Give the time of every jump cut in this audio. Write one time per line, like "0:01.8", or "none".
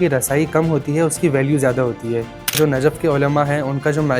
0:02.6